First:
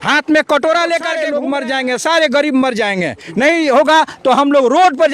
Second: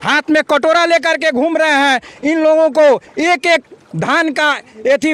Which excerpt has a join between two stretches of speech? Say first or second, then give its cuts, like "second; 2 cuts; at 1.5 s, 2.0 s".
first; 1 cut; at 1.2 s